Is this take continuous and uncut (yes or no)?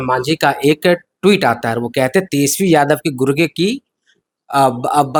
yes